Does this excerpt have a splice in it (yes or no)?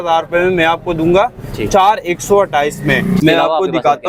no